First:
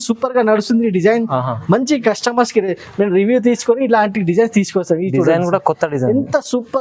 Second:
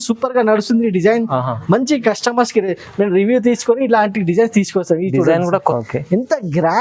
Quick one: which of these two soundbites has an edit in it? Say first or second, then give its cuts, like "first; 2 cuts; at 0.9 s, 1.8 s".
second; 1 cut; at 5.7 s